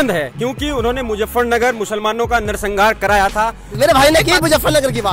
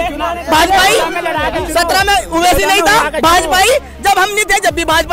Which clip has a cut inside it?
first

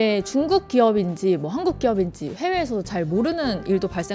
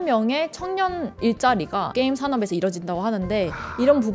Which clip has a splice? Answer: second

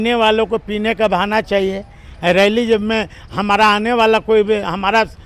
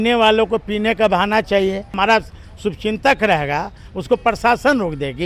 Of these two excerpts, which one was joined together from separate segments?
second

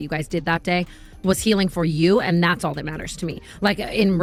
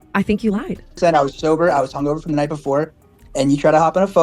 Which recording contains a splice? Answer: second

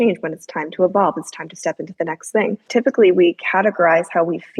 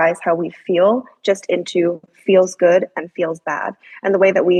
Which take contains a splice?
first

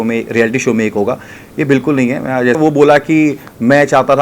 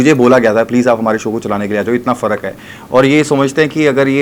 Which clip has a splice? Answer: first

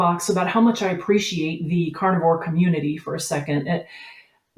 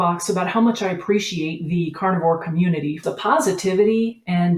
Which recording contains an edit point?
second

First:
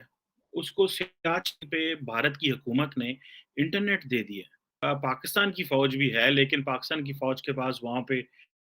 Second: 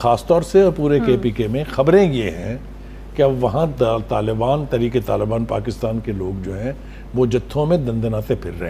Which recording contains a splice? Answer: first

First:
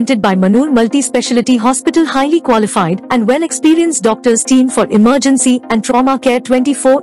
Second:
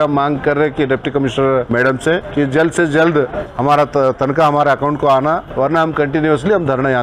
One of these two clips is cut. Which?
second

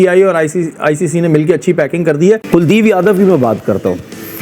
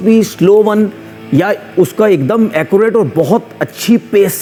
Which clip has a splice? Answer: first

